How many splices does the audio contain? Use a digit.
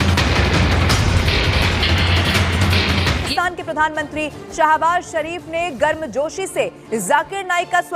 1